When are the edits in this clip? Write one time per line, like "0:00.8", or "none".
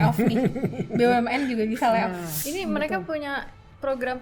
0:02.3